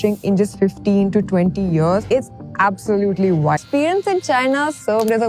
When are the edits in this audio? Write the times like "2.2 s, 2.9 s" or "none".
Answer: 2.0 s, 3.6 s